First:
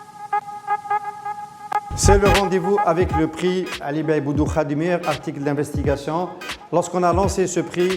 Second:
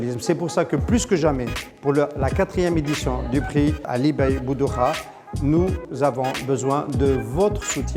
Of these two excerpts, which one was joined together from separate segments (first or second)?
first